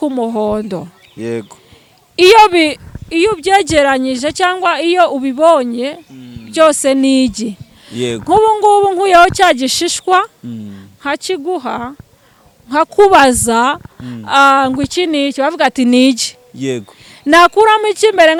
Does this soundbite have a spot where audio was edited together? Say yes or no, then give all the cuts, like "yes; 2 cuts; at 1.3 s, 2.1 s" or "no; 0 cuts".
no; 0 cuts